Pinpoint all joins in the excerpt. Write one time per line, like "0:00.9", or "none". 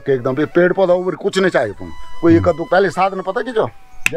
0:02.6